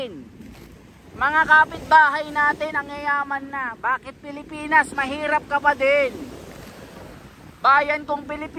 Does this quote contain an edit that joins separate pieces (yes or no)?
no